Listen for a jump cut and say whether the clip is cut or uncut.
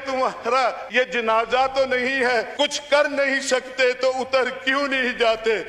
cut